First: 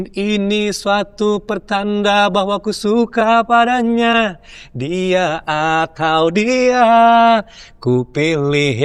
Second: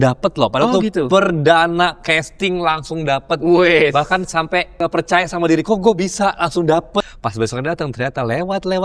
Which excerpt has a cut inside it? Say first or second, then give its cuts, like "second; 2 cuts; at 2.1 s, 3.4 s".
second; 2 cuts; at 4.7 s, 7.1 s